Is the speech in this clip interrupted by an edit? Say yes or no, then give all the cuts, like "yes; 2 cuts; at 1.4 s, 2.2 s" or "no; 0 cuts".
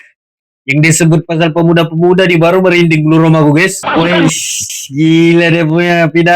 yes; 1 cut; at 3.9 s